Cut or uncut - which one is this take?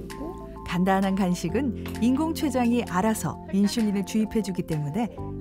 uncut